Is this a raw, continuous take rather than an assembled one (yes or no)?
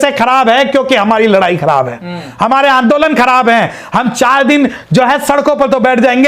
yes